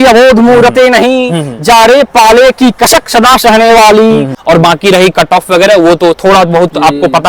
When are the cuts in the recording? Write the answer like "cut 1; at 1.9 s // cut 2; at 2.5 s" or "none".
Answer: cut 1; at 4.3 s